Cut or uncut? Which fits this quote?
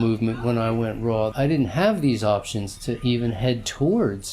cut